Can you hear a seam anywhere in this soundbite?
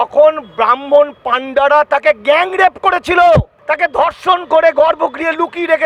no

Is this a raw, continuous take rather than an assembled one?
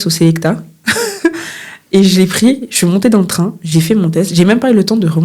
yes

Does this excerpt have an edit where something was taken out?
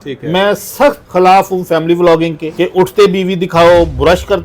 yes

